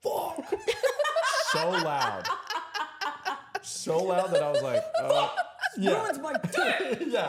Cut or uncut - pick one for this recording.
uncut